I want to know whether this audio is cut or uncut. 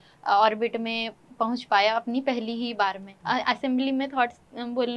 cut